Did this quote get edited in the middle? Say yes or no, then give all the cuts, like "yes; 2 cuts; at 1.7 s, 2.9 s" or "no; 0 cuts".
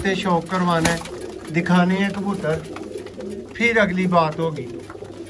no; 0 cuts